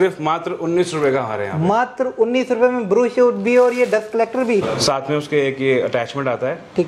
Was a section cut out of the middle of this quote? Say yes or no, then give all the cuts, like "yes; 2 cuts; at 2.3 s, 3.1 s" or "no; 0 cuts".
yes; 1 cut; at 4.7 s